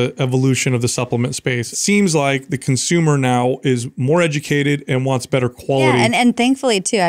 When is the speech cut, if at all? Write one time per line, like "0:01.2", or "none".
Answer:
0:01.7
0:06.0